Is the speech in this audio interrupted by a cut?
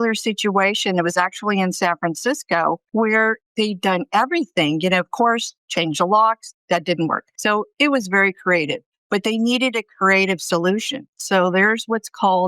yes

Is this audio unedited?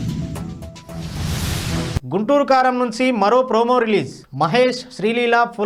yes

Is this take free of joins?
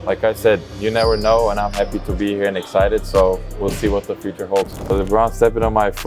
no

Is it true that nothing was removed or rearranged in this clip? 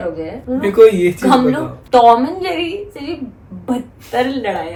yes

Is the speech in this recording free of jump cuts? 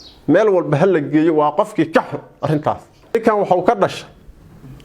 no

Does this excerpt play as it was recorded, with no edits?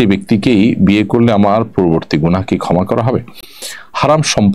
yes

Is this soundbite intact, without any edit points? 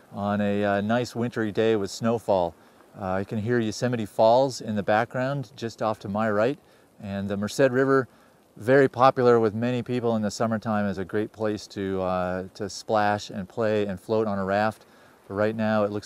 yes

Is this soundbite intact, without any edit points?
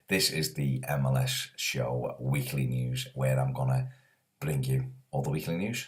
yes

